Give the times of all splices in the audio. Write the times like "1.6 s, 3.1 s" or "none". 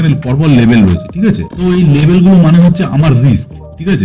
none